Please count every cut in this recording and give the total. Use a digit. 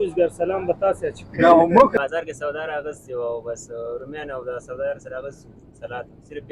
1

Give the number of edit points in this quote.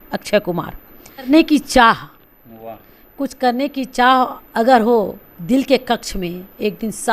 1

